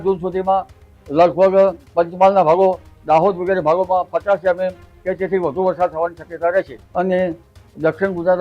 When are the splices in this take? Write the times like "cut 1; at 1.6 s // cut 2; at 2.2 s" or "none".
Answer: cut 1; at 1.8 s // cut 2; at 6.8 s